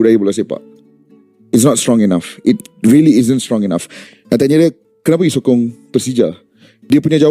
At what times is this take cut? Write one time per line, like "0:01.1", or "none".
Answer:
0:03.9